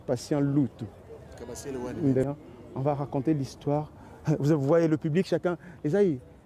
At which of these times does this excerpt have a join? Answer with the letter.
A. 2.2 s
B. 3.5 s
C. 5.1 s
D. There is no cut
A